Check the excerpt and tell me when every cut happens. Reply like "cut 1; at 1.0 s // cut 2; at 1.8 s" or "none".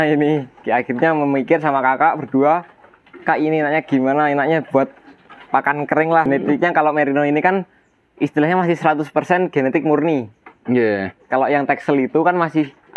cut 1; at 6.3 s